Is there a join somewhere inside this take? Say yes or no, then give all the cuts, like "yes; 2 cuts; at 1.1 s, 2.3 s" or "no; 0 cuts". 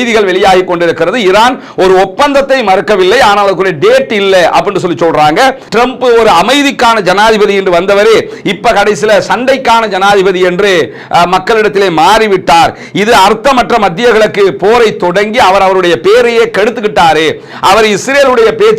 yes; 1 cut; at 5.6 s